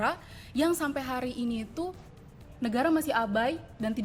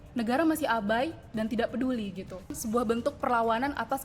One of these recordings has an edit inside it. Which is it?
second; 1 cut; at 2.6 s

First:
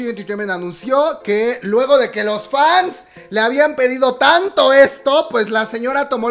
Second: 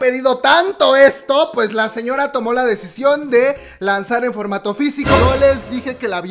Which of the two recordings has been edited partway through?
second; 1 cut; at 5.2 s

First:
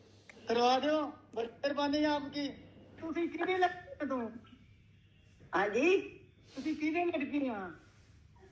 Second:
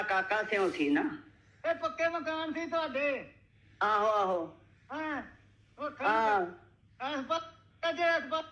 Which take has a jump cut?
first; 1 cut; at 3.0 s

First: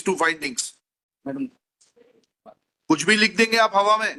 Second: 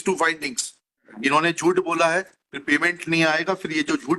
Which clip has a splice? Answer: second; 1 cut; at 1.1 s

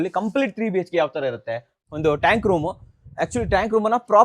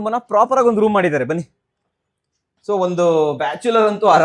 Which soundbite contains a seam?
first; 1 cut; at 1.8 s

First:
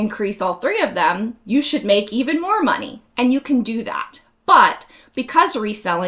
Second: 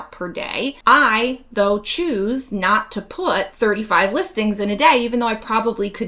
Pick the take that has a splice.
second; 2 cuts; at 0.8 s, 3.5 s

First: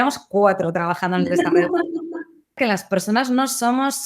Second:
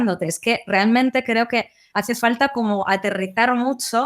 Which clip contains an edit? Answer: first; 1 cut; at 2.6 s

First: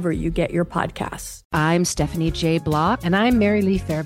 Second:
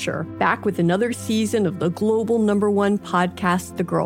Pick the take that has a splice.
first; 1 cut; at 1.3 s

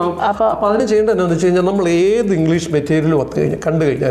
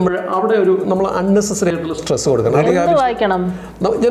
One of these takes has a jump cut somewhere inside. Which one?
second; 1 cut; at 2.6 s

